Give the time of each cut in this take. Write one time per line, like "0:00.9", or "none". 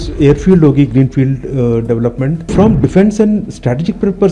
0:02.5